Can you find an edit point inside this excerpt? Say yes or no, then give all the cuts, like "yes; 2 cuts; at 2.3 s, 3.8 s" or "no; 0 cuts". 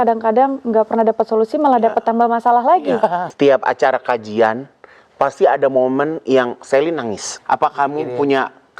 yes; 2 cuts; at 3.3 s, 7.3 s